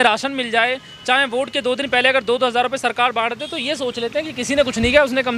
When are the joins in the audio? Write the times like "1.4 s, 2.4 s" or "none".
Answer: none